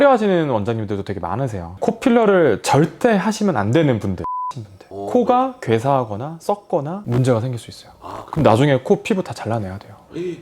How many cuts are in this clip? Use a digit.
2